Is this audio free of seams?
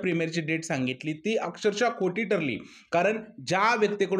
yes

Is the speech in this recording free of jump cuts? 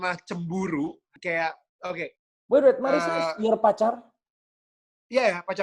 no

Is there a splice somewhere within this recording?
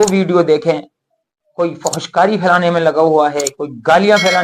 no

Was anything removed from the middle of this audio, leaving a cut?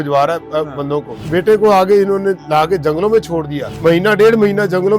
no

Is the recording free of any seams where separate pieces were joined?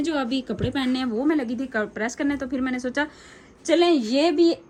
yes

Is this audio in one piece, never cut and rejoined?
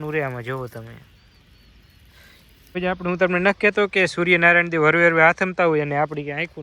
no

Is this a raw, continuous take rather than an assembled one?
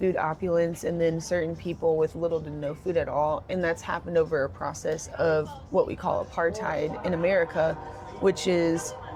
yes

